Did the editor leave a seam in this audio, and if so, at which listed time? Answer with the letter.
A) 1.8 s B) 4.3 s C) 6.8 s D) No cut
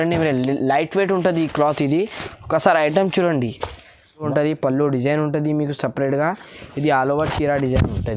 B